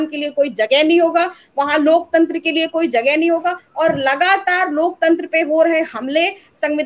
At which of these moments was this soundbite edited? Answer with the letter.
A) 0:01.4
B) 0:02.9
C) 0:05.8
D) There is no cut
D